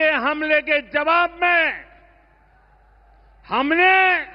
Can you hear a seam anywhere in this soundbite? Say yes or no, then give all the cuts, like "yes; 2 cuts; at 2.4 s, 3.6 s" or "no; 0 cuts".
no; 0 cuts